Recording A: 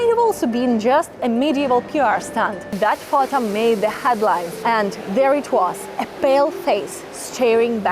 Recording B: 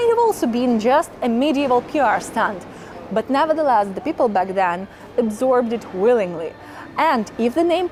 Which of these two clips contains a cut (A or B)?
A